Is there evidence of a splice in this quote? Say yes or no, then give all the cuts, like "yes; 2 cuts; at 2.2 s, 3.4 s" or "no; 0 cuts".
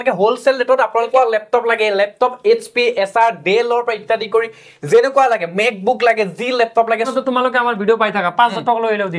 yes; 2 cuts; at 1.1 s, 7.1 s